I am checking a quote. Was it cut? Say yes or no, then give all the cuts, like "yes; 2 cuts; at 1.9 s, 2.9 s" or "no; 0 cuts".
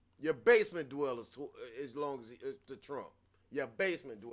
no; 0 cuts